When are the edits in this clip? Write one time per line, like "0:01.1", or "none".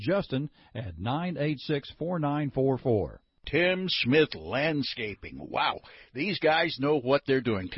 none